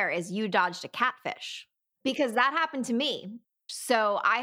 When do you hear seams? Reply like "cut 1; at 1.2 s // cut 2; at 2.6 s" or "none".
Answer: cut 1; at 1.9 s // cut 2; at 3.5 s